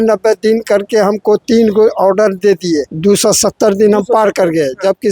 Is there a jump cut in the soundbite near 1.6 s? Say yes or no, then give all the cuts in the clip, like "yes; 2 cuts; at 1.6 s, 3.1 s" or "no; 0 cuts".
no; 1 cut; at 2.9 s